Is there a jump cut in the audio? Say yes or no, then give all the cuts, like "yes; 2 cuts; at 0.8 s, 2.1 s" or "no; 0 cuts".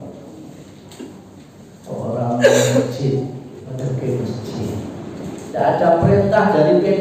yes; 2 cuts; at 3.7 s, 5.4 s